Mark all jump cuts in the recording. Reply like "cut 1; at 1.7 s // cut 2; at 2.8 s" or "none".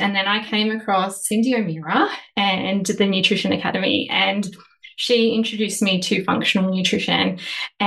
cut 1; at 1.2 s